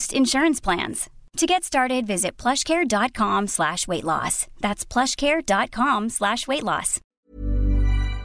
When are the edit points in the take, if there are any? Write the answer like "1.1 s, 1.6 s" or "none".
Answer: 7.0 s